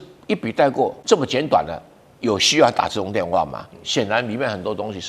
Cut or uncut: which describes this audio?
cut